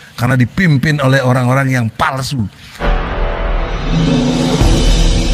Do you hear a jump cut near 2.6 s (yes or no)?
yes